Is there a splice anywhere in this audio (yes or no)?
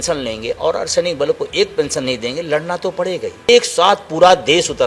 yes